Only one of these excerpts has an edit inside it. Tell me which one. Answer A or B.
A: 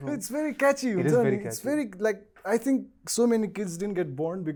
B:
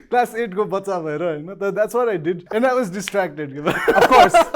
B